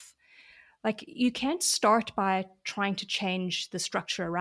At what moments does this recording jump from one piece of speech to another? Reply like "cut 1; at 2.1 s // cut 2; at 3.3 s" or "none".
none